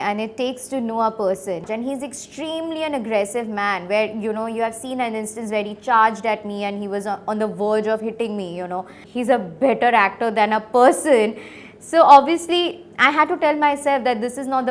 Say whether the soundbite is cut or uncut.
cut